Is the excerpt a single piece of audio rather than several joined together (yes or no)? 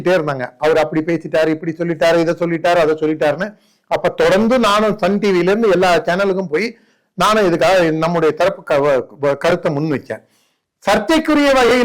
yes